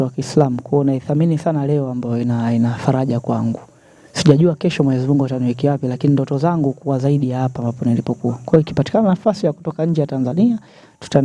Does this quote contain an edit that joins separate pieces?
no; 0 cuts

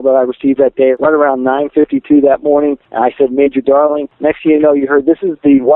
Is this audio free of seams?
no; 3 cuts; at 1.0 s, 2.9 s, 4.1 s

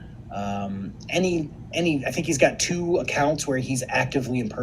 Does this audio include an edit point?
yes; 1 cut; at 1.6 s

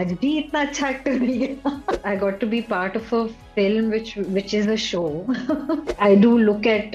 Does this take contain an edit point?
yes; 2 cuts; at 2.0 s, 5.9 s

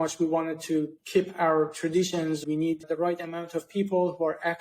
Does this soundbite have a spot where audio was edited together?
yes; 2 cuts; at 1.0 s, 2.4 s

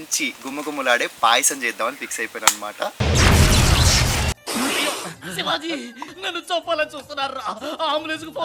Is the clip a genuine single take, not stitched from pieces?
yes; 0 cuts

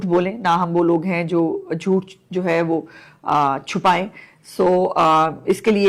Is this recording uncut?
yes; 0 cuts

